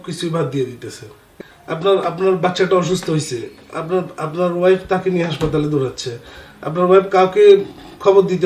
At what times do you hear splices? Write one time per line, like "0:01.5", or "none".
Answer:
0:01.3